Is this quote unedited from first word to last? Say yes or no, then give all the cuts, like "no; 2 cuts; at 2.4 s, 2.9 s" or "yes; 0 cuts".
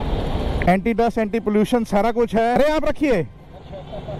no; 1 cut; at 2.6 s